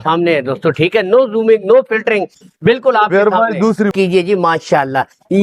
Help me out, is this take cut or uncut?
cut